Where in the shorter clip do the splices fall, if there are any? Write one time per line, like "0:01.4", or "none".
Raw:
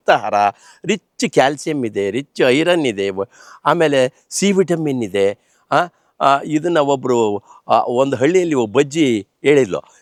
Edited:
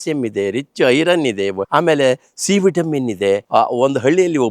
0:01.6
0:03.4